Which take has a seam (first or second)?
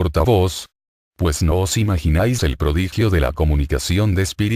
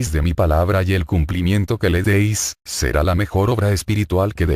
first